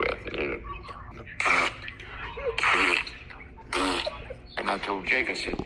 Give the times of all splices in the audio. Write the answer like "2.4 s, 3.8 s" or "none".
1.1 s